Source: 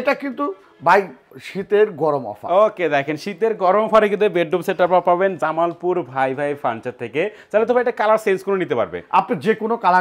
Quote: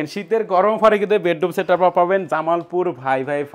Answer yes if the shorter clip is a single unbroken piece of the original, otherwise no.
yes